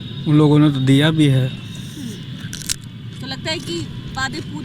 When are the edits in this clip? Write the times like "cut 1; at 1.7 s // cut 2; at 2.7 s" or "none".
cut 1; at 1.6 s